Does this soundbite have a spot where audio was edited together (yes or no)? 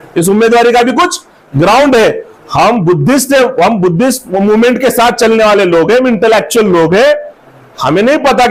no